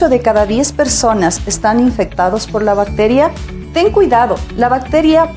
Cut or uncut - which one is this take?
uncut